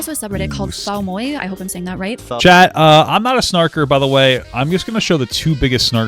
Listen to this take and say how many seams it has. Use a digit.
0